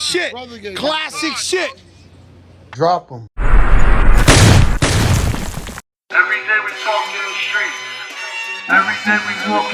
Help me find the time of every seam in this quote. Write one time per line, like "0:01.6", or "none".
0:02.6